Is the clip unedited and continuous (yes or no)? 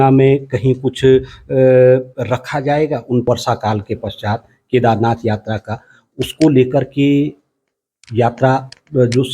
no